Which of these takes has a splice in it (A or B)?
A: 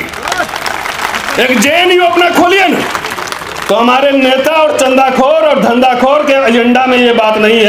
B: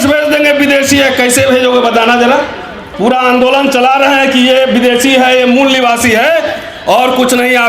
B